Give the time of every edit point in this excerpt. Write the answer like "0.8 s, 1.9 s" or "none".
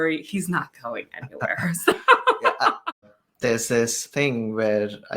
3.2 s, 4.0 s